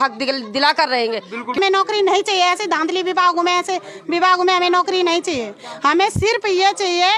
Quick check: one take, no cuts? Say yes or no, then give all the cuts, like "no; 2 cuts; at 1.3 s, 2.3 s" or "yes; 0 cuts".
no; 1 cut; at 1.6 s